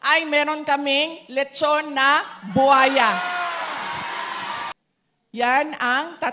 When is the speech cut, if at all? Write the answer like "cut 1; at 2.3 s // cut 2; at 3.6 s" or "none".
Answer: cut 1; at 4.7 s